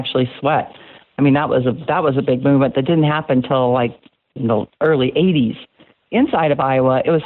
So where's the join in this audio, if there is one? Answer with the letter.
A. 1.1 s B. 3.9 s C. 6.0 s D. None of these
C